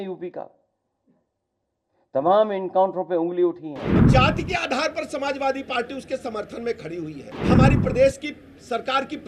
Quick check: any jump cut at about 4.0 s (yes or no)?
yes